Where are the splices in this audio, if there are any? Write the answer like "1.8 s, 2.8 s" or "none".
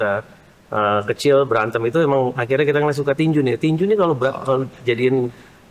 none